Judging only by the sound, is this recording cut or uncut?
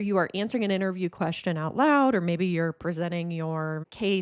uncut